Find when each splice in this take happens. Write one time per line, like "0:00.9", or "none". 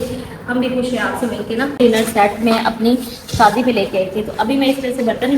0:01.8

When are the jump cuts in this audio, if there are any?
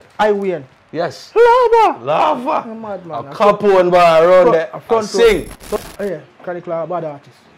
0:05.8

